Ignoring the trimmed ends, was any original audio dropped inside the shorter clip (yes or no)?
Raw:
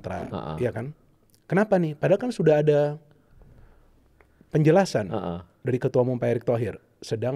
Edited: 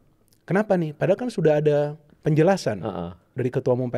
yes